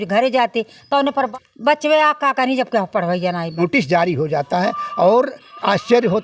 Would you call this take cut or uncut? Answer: cut